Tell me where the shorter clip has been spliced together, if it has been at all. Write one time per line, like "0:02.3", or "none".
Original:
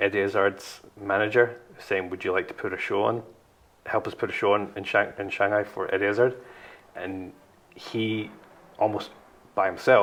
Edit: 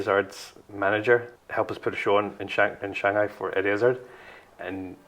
0:01.4